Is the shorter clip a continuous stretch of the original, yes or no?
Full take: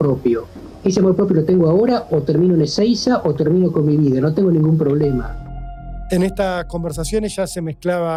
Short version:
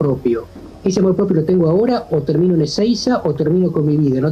yes